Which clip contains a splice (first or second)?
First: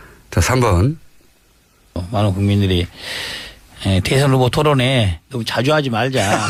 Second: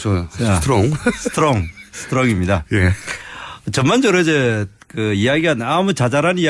second